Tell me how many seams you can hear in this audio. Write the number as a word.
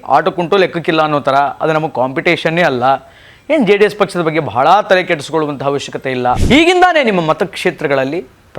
one